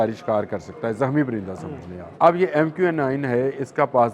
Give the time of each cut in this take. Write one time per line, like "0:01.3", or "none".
0:02.0